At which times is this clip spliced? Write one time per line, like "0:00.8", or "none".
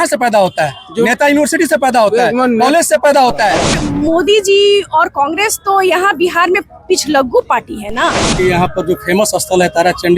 0:03.8
0:08.4

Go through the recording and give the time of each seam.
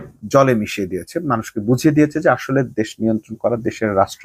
none

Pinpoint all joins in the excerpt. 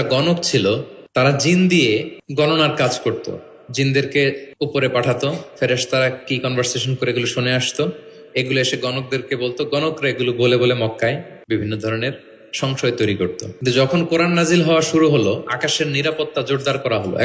0:01.0
0:02.2
0:04.5
0:11.3
0:13.5

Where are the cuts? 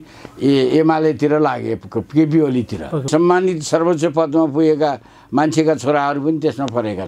0:03.1

